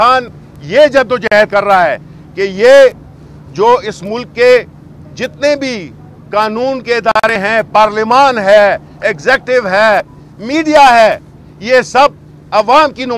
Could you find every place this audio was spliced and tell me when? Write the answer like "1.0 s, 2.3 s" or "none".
none